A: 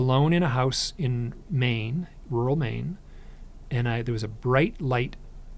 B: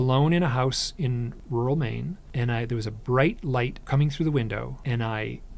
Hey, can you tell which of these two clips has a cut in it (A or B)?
B